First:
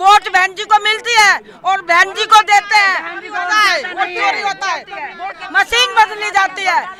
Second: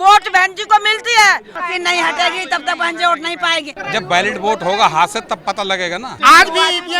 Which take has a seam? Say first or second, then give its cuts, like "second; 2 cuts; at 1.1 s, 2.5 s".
second; 3 cuts; at 1.5 s, 3.8 s, 6.1 s